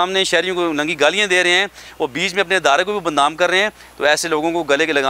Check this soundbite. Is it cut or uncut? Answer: uncut